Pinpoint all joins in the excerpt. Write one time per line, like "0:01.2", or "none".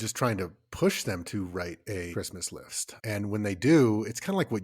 0:02.6